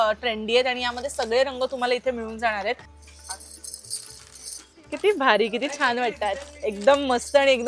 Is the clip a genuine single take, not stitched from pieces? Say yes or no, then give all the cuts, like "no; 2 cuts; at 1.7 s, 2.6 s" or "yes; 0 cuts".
no; 1 cut; at 2.9 s